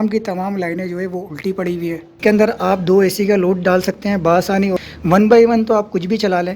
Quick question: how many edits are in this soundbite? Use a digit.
2